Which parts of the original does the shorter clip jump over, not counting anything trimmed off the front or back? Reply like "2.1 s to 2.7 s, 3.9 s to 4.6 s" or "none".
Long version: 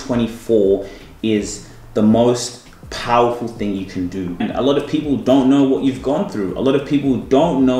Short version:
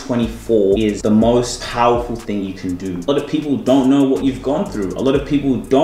0.9 s to 1.8 s, 2.5 s to 2.9 s, 4.4 s to 4.7 s

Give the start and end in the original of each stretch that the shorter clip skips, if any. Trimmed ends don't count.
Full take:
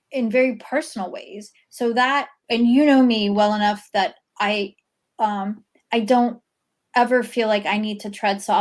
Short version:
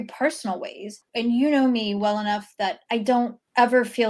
1.5 s to 2.4 s, 4.4 s to 6.4 s

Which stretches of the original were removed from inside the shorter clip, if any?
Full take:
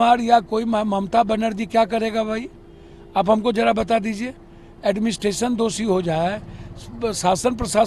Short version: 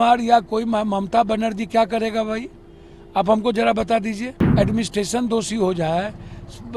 4.4 s to 4.6 s

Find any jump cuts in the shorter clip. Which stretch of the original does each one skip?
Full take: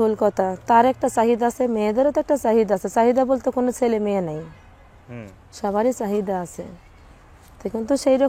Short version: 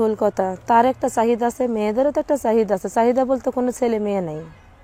none

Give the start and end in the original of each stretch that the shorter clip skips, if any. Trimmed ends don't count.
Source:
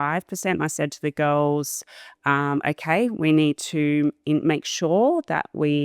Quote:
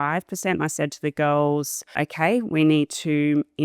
2.0 s to 2.6 s

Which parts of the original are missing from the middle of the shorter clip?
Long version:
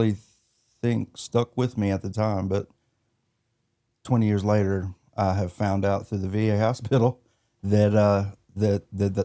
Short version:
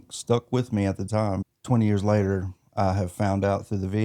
2.5 s to 3.8 s

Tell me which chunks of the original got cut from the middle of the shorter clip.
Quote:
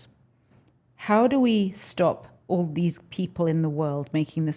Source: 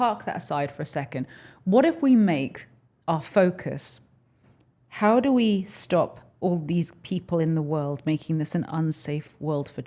none

